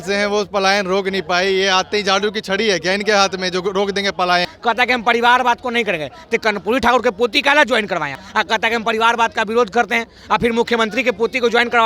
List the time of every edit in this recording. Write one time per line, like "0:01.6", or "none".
0:04.5
0:08.2